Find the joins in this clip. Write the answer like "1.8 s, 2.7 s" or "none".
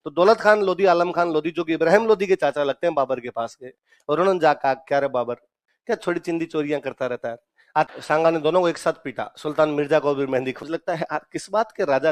7.9 s, 10.6 s